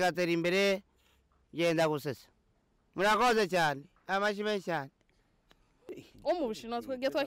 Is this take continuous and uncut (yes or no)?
no